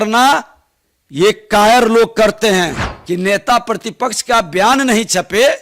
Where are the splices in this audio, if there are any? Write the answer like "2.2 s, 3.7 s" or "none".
2.9 s